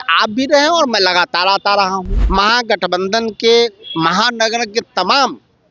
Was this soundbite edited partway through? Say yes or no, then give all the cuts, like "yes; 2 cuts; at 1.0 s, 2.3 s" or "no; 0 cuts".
yes; 1 cut; at 2.1 s